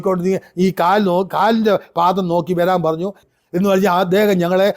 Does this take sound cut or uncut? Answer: cut